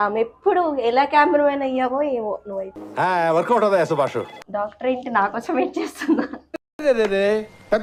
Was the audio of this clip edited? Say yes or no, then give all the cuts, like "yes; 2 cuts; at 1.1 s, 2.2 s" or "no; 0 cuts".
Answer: no; 0 cuts